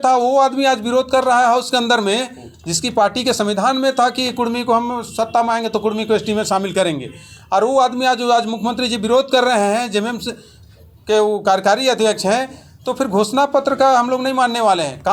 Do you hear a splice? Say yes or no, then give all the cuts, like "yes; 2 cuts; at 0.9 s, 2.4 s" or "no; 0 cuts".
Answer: no; 0 cuts